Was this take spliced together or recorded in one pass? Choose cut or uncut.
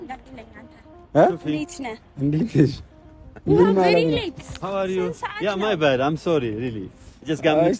uncut